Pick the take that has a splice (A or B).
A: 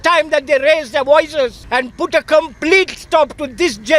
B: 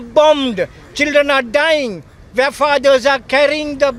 A